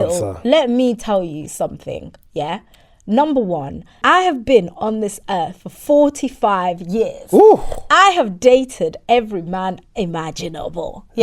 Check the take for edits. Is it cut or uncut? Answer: cut